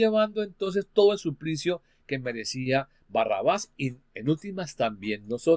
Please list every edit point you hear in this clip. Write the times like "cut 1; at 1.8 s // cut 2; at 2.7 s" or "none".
none